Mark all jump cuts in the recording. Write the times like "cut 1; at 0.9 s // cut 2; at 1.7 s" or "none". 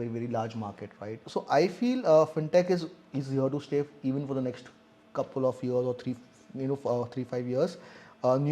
cut 1; at 1.2 s